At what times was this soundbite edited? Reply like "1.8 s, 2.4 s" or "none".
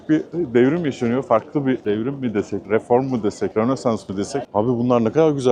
2.2 s, 3.5 s, 4.4 s